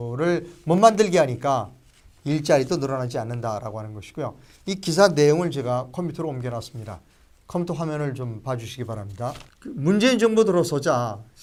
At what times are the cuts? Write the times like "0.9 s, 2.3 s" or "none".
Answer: none